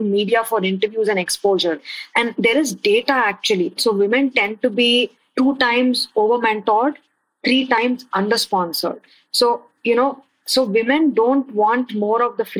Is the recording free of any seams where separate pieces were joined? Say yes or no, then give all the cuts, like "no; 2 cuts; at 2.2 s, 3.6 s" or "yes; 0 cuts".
no; 3 cuts; at 1.8 s, 3.8 s, 9.0 s